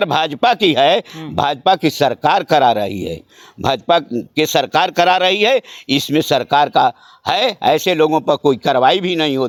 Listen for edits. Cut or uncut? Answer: uncut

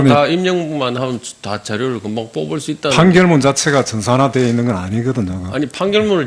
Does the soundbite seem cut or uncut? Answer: cut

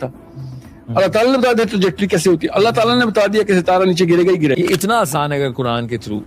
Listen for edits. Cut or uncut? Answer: cut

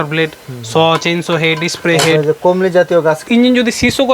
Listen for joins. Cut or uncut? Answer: cut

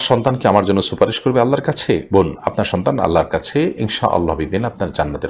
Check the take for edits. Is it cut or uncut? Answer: uncut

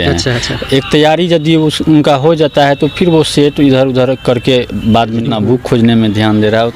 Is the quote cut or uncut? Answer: cut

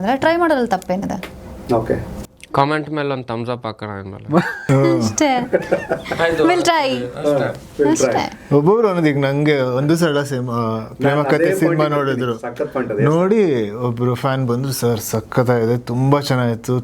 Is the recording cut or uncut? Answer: uncut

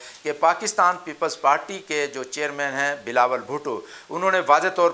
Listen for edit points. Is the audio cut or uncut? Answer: uncut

